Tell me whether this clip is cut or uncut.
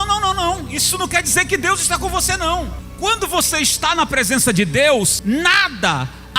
cut